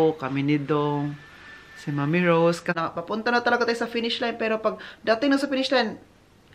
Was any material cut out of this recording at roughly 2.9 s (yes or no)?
yes